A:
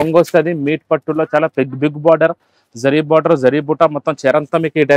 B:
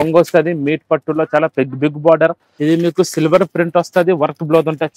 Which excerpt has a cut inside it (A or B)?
B